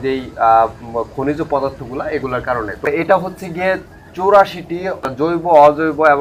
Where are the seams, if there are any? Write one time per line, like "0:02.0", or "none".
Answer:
0:02.9
0:05.1